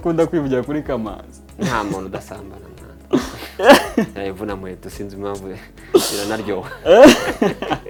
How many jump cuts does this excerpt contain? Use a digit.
0